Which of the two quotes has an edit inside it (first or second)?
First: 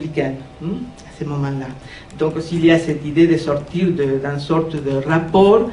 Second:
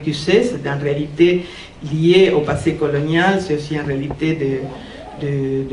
second